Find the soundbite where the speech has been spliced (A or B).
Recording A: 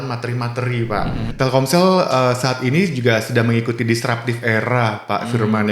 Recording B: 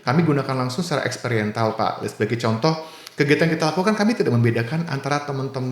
A